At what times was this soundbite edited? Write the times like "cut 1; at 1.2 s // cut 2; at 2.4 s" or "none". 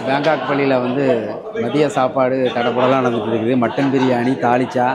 none